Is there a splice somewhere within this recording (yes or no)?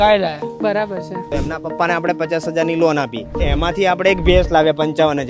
yes